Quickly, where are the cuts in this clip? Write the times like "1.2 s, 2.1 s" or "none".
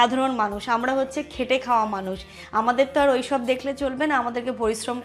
none

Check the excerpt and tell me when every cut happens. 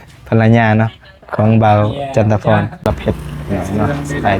2.9 s

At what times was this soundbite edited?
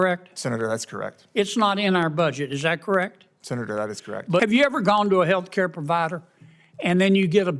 4.4 s

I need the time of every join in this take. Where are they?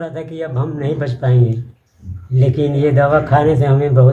none

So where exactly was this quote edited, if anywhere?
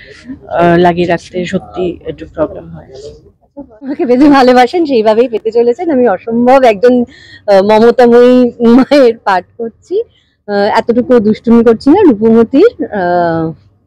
3.7 s

